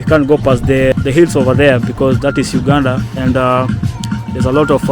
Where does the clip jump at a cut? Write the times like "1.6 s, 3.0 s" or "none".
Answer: 0.9 s